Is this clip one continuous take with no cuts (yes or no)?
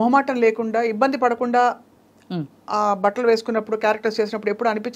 yes